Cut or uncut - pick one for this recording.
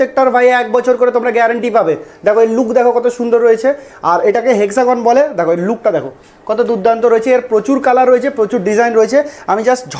uncut